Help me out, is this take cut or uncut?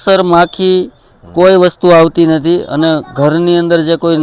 uncut